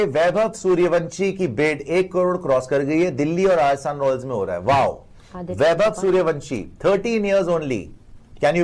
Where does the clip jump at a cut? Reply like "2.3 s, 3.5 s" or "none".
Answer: none